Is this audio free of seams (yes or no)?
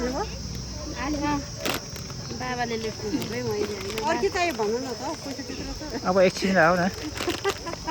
yes